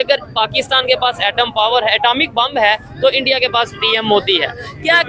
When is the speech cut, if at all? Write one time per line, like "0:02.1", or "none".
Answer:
none